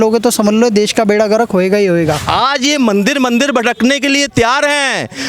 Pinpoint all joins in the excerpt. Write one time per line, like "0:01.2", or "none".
0:02.2